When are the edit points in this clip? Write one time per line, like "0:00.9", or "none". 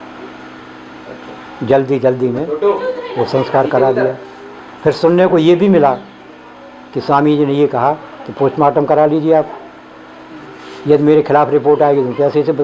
none